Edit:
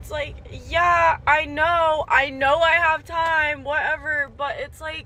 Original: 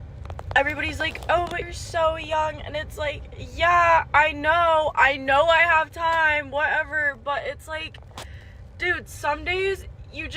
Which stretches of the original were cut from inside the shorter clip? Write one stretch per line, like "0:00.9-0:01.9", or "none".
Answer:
none